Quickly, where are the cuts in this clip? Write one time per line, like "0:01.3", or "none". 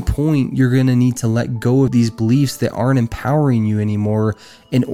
0:01.9